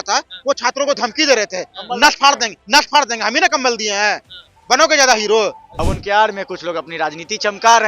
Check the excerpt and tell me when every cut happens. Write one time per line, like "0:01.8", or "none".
0:05.7